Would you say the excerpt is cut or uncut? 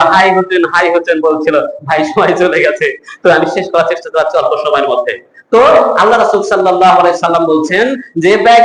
uncut